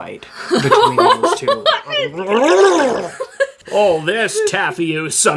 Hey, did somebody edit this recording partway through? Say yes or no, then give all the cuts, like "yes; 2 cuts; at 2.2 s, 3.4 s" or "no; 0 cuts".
yes; 1 cut; at 3.6 s